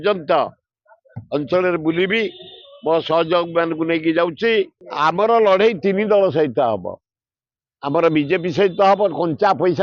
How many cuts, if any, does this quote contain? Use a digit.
1